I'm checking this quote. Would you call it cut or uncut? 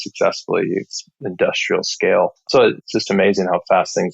cut